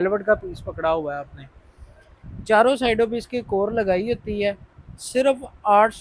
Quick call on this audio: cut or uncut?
uncut